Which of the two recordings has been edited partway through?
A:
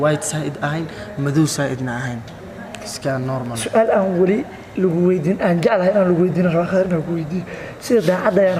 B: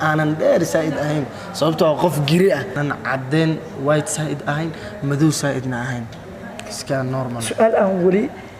B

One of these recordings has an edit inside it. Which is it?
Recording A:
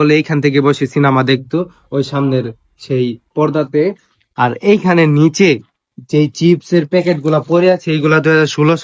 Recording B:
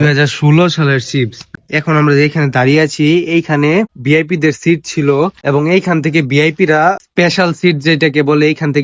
B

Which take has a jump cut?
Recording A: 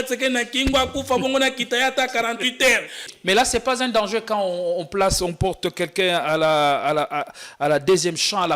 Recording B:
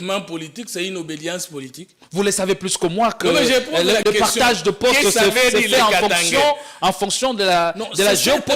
A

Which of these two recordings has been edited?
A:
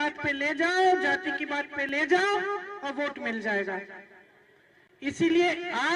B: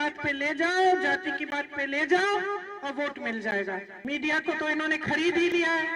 B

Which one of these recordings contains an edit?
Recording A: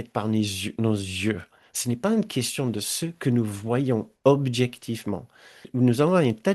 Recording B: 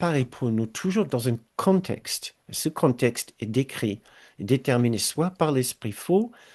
A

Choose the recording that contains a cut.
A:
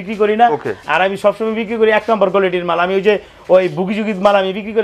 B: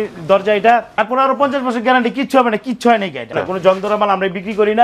B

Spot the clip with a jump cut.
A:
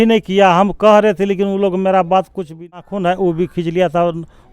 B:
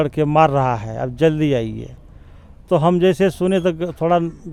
A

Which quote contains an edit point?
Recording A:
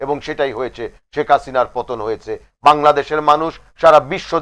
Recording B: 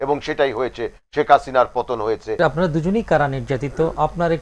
B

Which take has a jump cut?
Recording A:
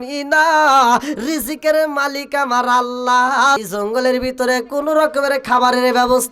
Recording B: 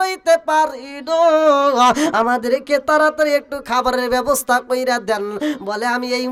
A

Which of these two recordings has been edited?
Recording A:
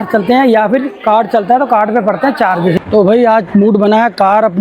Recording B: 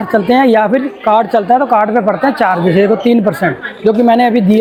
A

